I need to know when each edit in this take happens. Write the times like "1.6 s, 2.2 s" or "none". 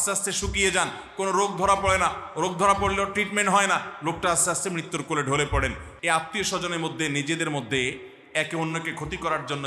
5.9 s